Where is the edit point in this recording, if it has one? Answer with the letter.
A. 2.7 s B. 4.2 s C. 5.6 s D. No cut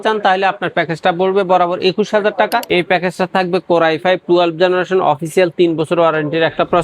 A